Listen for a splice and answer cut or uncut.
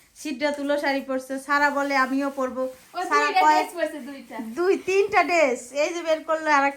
uncut